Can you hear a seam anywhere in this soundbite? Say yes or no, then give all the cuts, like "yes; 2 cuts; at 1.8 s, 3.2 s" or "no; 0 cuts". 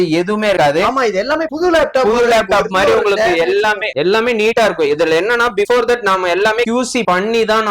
no; 0 cuts